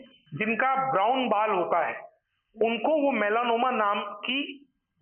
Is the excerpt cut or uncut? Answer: uncut